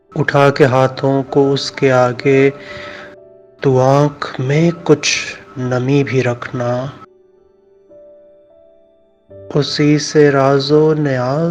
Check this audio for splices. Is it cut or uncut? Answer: cut